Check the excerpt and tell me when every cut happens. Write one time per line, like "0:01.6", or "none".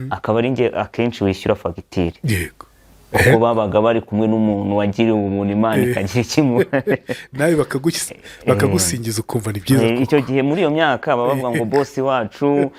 none

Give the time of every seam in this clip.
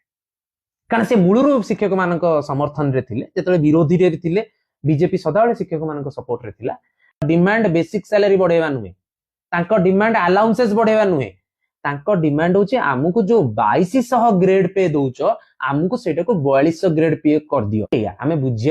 0:07.2
0:17.9

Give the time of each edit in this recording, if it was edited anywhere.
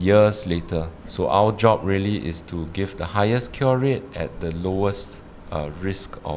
0:01.0

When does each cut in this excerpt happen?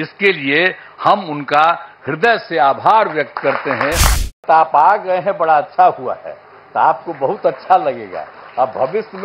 0:04.4

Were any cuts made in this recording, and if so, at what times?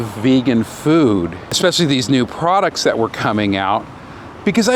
0:01.6

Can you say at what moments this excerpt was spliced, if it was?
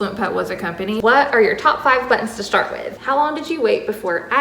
0:01.0
0:02.8

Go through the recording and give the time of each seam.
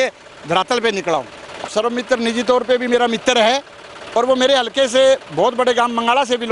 0:01.7

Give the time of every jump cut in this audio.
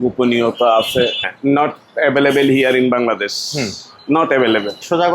0:01.2

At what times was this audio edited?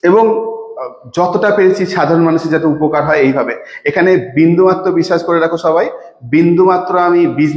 none

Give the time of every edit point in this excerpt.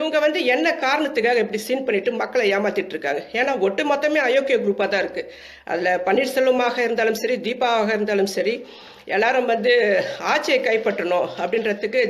none

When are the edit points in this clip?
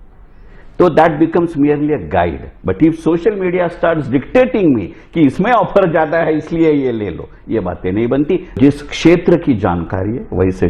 0:08.6

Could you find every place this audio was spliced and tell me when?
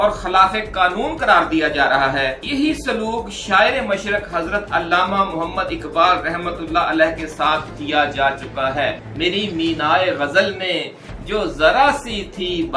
0:09.1

